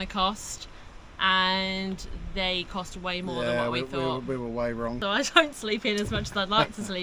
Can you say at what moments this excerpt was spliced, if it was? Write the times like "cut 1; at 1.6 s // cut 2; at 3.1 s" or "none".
cut 1; at 5.0 s